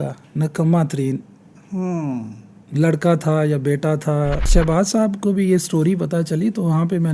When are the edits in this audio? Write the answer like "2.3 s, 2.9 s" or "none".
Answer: 4.5 s